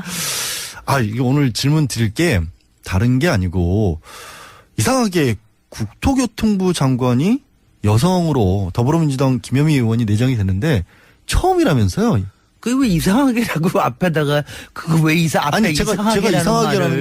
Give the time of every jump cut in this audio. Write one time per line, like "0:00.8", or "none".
0:11.6